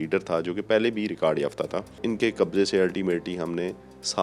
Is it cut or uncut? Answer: cut